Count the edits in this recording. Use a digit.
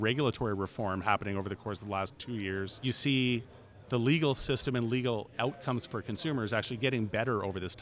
1